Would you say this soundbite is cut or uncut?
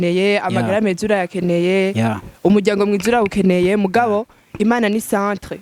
uncut